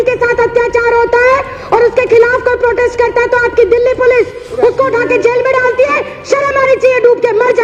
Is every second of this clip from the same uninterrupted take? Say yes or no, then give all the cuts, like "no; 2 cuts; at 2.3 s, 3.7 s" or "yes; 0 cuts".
yes; 0 cuts